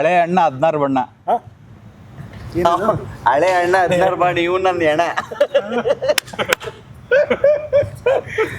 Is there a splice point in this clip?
no; 0 cuts

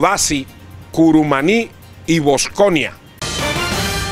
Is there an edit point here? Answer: yes; 1 cut; at 3.2 s

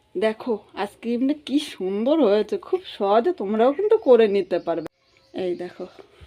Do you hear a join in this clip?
yes; 1 cut; at 4.8 s

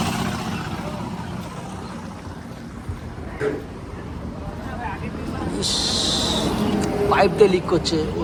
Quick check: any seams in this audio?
no; 0 cuts

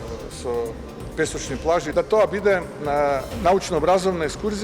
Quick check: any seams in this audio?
yes; 1 cut; at 1.9 s

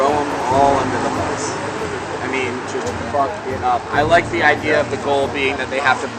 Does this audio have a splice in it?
no; 0 cuts

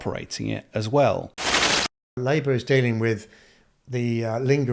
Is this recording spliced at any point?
yes; 1 cut; at 1.7 s

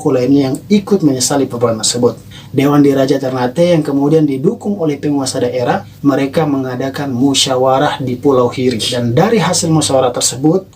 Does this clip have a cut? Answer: yes; 2 cuts; at 5.9 s, 8.9 s

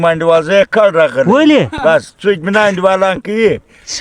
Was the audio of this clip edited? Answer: no; 0 cuts

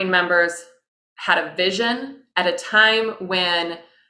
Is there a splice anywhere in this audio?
no; 0 cuts

